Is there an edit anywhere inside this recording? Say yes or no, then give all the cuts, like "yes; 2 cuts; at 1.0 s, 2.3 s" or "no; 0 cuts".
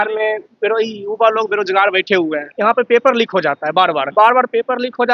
yes; 2 cuts; at 2.5 s, 4.0 s